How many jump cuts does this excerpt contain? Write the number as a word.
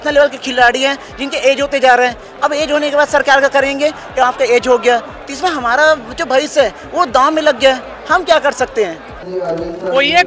one